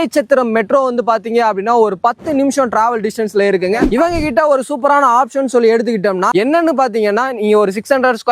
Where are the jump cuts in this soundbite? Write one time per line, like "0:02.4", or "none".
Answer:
0:03.9
0:06.3